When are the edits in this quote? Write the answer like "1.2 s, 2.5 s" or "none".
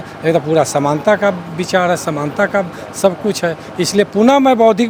none